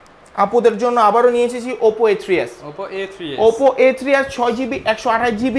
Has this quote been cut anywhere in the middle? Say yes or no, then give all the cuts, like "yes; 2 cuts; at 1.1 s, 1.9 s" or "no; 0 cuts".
no; 0 cuts